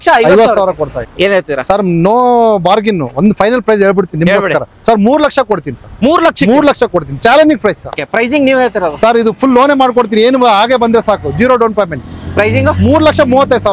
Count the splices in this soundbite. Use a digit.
2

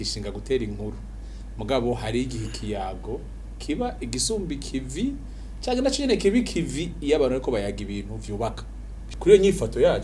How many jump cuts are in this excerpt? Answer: 1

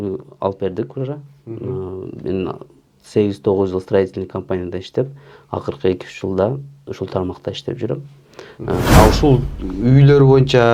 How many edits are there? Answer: 1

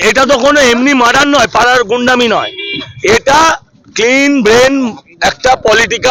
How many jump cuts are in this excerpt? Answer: 0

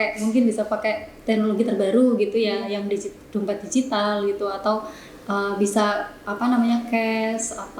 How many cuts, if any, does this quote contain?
0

